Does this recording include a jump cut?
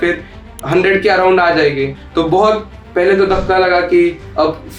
yes; 1 cut; at 2.0 s

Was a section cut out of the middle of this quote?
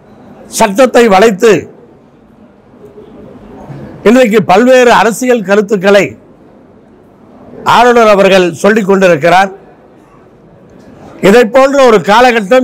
no; 0 cuts

